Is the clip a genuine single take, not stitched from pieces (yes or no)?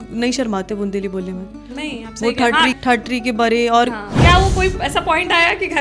no